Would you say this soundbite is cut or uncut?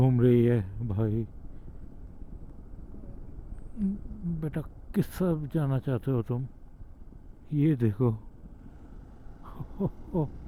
uncut